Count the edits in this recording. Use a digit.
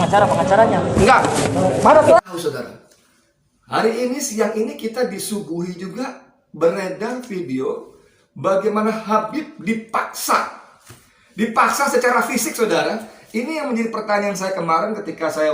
1